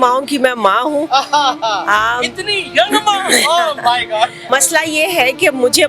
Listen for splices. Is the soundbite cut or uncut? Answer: cut